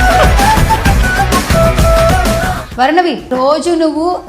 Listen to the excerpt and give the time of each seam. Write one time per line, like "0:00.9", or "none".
none